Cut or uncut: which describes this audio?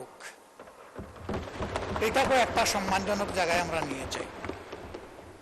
uncut